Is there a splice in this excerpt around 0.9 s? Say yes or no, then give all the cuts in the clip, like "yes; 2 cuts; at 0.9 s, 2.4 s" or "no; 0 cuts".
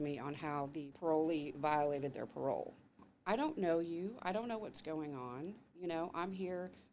yes; 2 cuts; at 0.9 s, 3.1 s